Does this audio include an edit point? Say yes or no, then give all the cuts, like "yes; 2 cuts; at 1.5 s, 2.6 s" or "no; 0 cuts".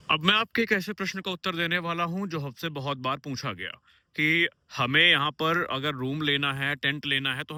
no; 0 cuts